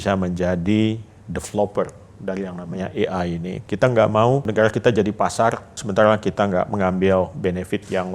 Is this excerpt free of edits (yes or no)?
no